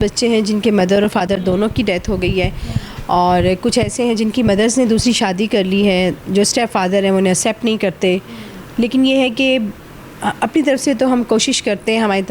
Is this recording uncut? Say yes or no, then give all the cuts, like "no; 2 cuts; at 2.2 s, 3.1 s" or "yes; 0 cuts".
yes; 0 cuts